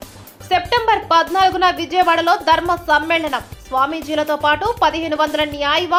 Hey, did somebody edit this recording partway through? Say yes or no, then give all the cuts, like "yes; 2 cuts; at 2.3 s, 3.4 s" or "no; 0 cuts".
no; 0 cuts